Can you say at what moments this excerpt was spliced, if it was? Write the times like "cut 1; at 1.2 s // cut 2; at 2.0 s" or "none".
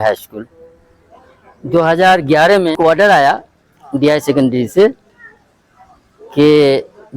cut 1; at 2.8 s